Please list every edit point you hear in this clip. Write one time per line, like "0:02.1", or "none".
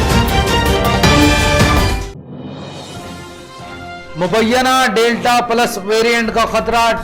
0:02.0